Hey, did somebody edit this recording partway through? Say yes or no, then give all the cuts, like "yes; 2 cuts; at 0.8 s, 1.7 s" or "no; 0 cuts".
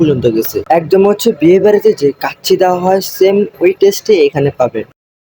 no; 0 cuts